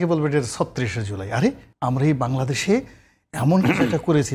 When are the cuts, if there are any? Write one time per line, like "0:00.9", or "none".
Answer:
0:01.7